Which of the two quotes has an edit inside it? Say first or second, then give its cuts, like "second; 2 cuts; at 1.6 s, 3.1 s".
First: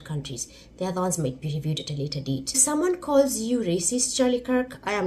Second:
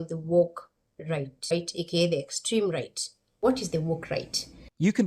second; 2 cuts; at 1.4 s, 3.3 s